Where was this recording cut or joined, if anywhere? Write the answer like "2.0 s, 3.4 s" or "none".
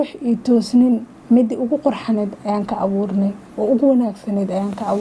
none